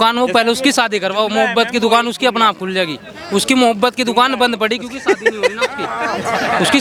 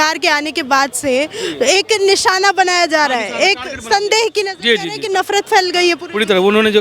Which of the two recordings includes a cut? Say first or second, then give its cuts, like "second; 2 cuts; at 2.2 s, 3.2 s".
second; 1 cut; at 5.0 s